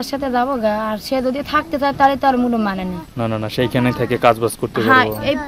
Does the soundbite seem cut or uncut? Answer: uncut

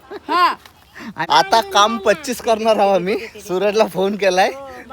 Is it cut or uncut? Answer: cut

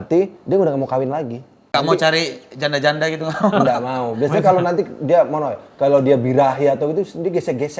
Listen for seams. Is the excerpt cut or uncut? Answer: cut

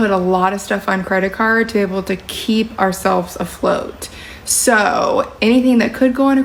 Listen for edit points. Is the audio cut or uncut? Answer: uncut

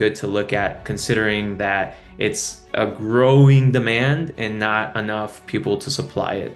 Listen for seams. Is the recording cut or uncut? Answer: uncut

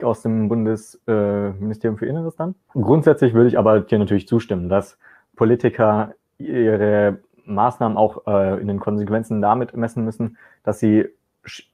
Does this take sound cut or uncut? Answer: cut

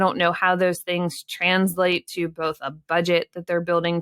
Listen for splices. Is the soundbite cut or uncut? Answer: uncut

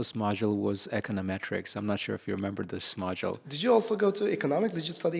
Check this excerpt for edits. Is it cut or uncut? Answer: uncut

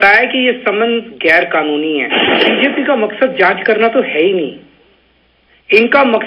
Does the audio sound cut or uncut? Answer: cut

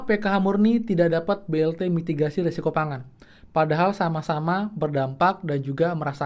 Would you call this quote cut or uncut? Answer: uncut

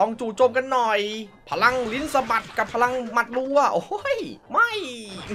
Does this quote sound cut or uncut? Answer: uncut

